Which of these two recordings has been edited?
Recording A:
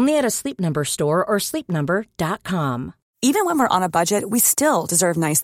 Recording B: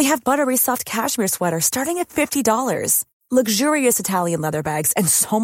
A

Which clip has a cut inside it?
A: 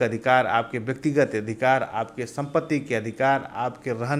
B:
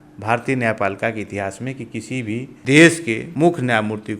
B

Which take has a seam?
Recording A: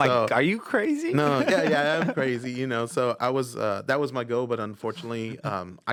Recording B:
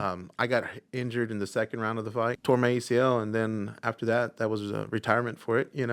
B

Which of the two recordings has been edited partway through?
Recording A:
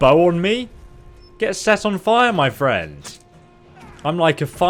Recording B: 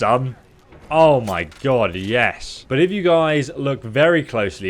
B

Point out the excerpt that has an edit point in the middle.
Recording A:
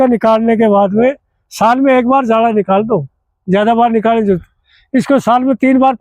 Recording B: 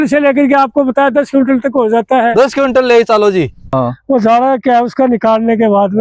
B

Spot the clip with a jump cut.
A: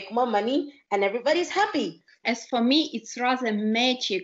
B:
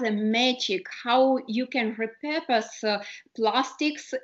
A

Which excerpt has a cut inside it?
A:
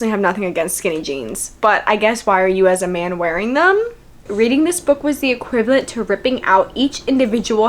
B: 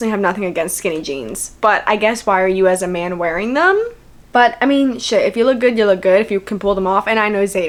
A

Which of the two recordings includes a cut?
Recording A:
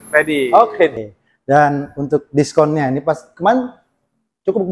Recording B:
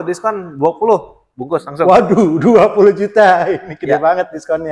A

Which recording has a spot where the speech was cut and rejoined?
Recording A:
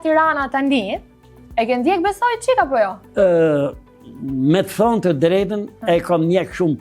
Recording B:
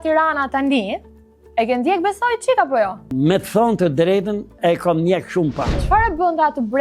B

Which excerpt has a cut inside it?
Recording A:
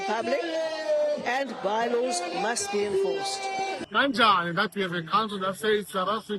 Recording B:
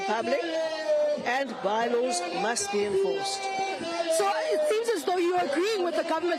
A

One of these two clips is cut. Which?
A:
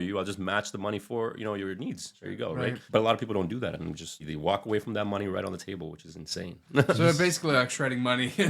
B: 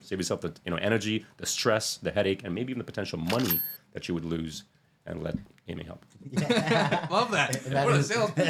A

